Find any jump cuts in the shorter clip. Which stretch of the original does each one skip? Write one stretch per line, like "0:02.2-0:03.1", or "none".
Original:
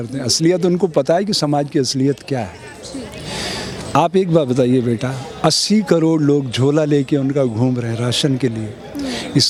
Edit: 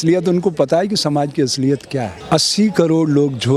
0:02.5-0:05.3